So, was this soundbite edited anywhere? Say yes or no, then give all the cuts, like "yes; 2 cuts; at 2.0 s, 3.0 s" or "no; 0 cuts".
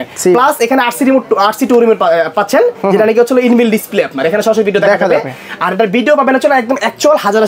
no; 0 cuts